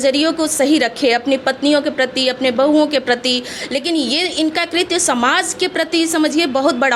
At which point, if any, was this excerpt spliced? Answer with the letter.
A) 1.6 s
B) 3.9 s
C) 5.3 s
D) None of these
D